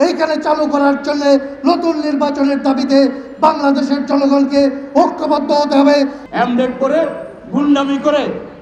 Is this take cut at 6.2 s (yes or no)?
yes